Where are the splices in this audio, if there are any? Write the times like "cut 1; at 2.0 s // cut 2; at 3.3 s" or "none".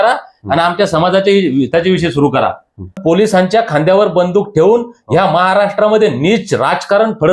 cut 1; at 3.0 s